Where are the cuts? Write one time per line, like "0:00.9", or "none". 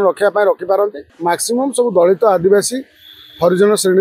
0:01.1